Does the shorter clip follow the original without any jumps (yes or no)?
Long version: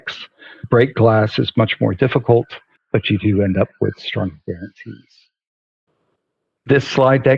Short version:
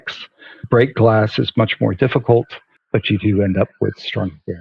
yes